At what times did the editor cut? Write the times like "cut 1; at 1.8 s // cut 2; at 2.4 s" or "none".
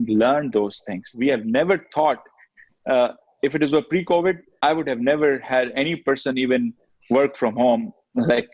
cut 1; at 1.0 s